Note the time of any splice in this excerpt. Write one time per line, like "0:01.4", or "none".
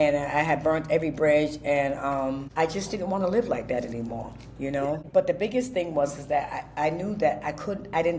0:02.5
0:05.0